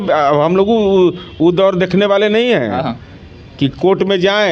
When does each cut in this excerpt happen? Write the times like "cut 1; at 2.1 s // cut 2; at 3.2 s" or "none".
none

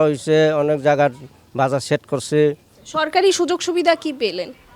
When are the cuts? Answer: cut 1; at 2.7 s

